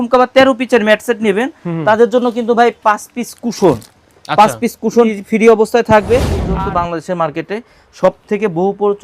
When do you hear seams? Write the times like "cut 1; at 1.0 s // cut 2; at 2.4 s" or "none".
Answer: cut 1; at 5.1 s // cut 2; at 6.4 s